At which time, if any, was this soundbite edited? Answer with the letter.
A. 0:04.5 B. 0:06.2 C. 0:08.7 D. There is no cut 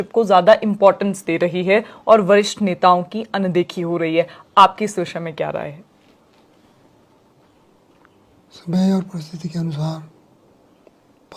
D